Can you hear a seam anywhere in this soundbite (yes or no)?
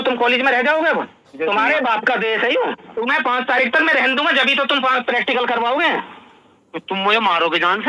yes